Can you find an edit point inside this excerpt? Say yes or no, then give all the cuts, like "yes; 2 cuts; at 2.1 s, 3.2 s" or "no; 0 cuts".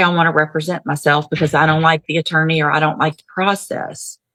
no; 0 cuts